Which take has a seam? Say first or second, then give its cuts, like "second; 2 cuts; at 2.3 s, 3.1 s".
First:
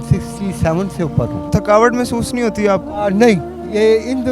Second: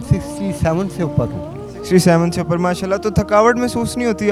first; 1 cut; at 1.4 s